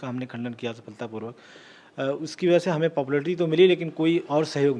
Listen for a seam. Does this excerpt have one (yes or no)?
no